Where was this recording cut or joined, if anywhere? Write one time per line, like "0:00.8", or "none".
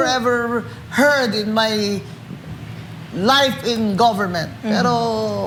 none